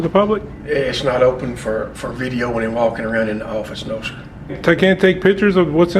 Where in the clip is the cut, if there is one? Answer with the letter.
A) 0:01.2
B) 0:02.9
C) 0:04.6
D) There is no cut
C